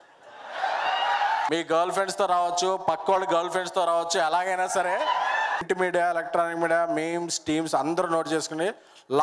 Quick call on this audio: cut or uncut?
cut